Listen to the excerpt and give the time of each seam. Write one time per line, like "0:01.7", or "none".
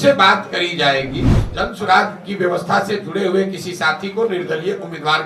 0:01.4

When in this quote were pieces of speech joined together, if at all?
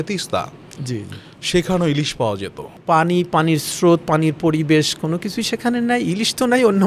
0:02.8

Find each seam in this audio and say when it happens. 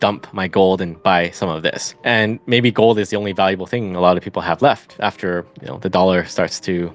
0:01.9

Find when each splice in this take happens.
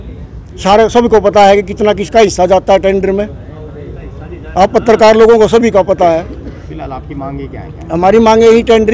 none

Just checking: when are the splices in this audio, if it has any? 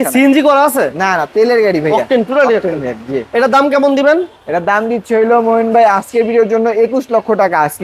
none

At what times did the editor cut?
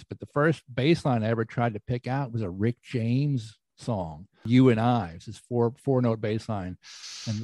0:04.4

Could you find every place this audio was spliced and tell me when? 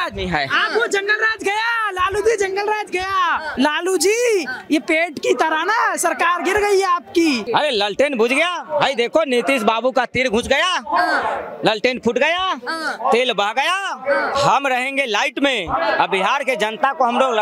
0:03.5
0:07.4
0:14.3

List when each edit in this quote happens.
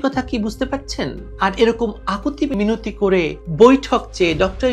0:01.2

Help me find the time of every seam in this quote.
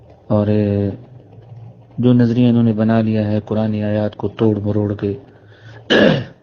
none

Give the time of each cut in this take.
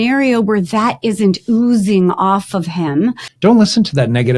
0:03.3

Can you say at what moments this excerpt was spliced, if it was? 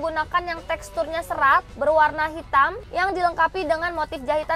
none

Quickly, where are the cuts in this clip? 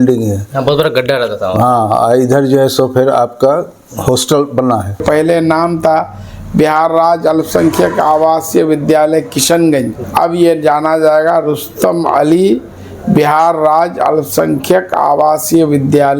0:05.0
0:10.0

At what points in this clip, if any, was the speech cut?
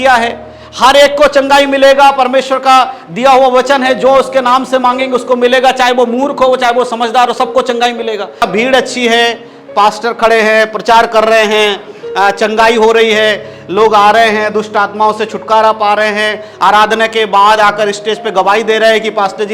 0:08.4

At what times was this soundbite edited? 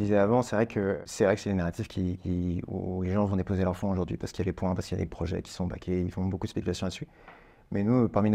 0:01.0

